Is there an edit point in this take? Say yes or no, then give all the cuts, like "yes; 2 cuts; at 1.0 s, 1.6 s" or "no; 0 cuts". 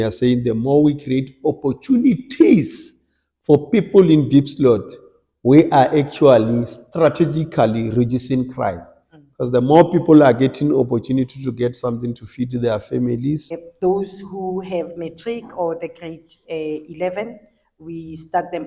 yes; 1 cut; at 13.6 s